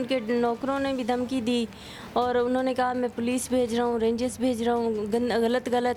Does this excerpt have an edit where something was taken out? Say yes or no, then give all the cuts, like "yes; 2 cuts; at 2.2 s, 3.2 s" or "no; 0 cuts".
no; 0 cuts